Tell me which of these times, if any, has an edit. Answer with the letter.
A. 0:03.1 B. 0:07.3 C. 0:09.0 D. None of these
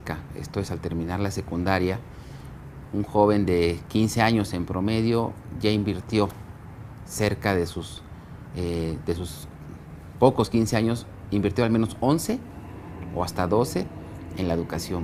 D